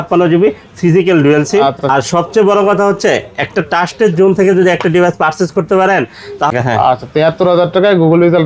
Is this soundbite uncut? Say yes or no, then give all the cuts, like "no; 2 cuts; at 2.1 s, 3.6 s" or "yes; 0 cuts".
no; 2 cuts; at 1.8 s, 6.5 s